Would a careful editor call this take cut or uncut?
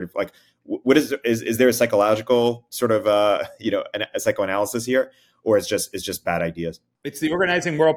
uncut